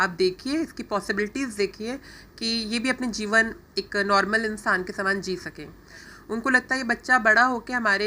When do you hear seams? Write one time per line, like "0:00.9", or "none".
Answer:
0:06.0